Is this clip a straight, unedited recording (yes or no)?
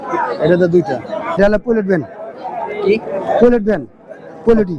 no